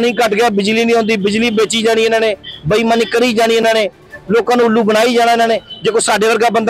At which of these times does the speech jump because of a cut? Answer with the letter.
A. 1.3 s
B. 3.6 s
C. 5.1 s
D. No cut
D